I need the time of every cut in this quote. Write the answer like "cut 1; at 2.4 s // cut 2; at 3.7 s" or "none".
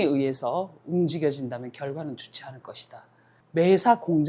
cut 1; at 3.3 s